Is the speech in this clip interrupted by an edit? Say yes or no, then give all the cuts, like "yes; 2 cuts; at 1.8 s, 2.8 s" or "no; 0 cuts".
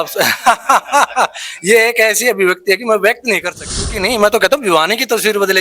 yes; 1 cut; at 4.0 s